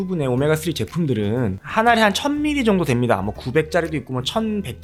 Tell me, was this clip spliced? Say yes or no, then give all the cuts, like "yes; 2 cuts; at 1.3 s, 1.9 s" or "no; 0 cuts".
no; 0 cuts